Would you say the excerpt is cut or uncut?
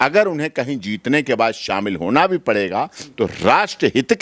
uncut